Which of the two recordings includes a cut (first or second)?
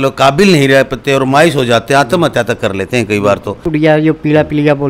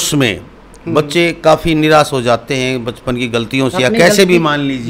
first